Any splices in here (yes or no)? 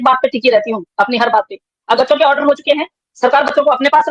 yes